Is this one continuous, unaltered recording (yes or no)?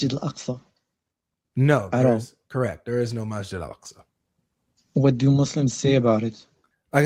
yes